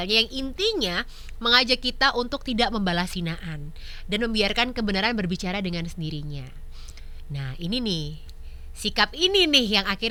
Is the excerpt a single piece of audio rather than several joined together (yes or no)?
yes